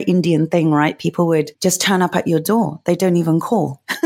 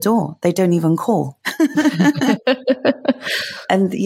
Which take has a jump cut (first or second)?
first